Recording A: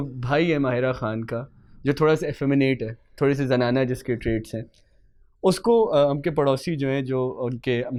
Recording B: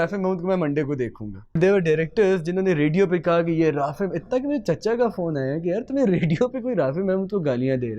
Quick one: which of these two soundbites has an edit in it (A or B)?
B